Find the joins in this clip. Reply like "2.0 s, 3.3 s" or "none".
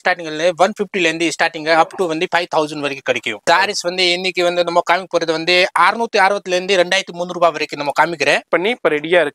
3.5 s, 8.4 s